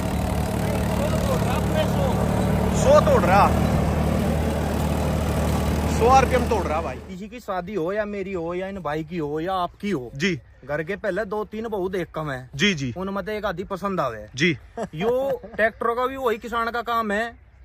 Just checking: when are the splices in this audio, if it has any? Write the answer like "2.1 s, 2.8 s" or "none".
6.9 s

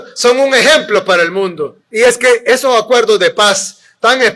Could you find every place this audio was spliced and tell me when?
1.8 s

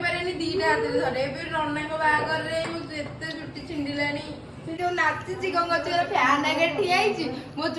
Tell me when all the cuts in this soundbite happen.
none

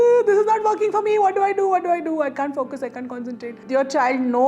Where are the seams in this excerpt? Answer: 3.6 s

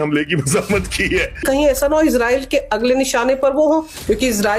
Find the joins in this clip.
1.4 s

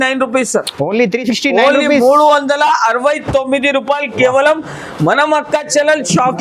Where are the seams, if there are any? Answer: none

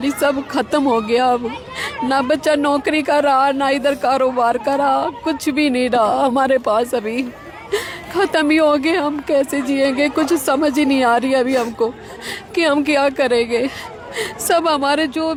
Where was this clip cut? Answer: none

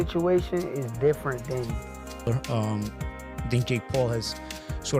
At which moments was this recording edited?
2.3 s

